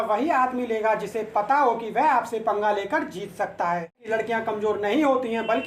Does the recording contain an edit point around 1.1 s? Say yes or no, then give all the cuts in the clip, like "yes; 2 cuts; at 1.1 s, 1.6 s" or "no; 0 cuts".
no; 1 cut; at 4.0 s